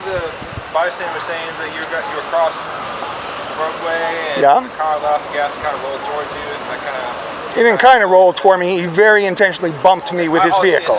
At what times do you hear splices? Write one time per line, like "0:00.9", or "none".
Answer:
none